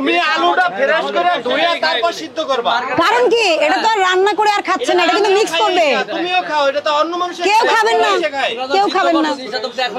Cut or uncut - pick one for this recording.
uncut